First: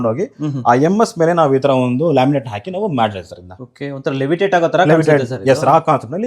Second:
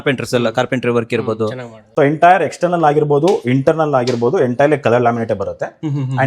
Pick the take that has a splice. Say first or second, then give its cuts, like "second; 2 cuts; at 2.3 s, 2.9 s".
second; 1 cut; at 1.8 s